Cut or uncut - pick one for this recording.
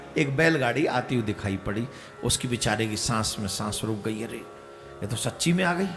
uncut